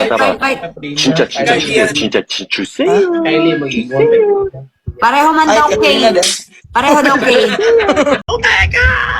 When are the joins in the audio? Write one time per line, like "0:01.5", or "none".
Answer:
0:08.2